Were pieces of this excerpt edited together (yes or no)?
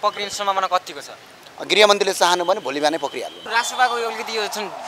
yes